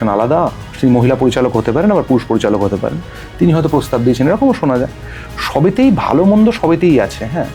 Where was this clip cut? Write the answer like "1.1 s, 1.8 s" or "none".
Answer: none